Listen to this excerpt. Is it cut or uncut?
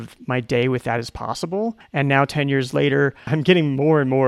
cut